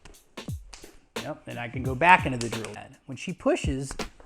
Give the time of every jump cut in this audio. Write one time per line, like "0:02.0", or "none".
0:02.9